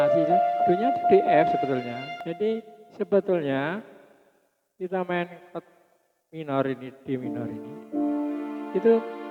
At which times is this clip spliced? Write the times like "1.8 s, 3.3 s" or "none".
none